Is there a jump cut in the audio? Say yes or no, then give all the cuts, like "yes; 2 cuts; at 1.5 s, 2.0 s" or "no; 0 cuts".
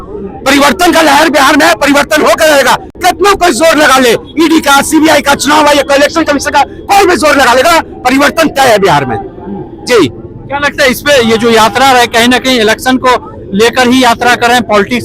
no; 0 cuts